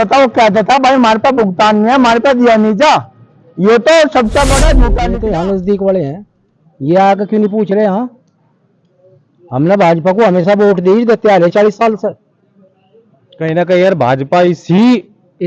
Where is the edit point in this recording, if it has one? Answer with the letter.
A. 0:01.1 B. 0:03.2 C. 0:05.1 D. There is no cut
C